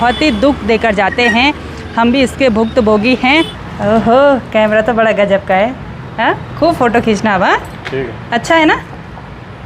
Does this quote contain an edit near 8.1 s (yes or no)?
no